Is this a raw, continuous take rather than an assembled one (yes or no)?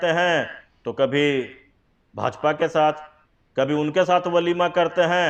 yes